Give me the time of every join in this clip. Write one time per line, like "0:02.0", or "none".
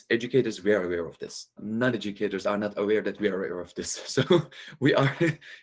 none